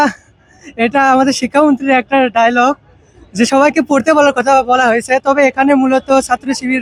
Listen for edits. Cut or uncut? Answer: uncut